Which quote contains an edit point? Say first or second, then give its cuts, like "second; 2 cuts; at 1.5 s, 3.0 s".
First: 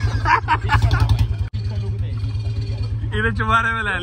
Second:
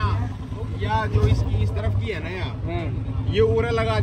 first; 1 cut; at 1.4 s